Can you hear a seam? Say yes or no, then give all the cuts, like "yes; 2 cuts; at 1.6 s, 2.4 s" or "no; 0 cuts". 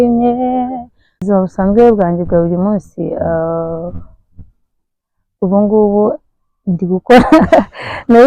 yes; 1 cut; at 1.2 s